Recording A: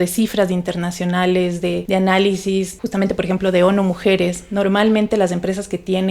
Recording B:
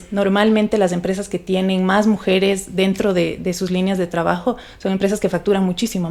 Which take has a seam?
A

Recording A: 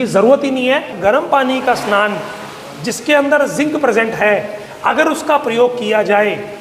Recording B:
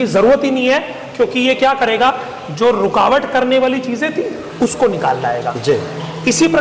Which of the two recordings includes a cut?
A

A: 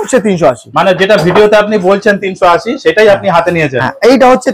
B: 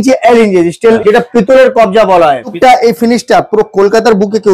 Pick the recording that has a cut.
B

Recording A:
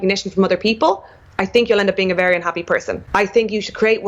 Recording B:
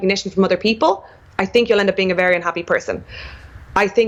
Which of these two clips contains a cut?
A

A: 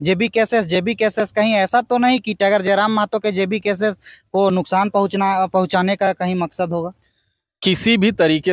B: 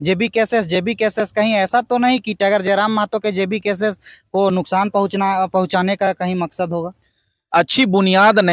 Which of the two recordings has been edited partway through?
B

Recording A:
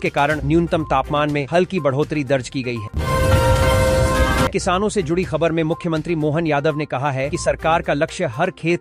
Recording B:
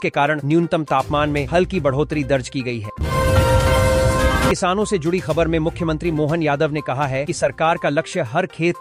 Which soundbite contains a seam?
A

